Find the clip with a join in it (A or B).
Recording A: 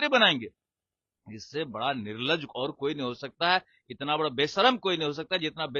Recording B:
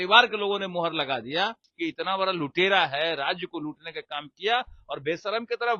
B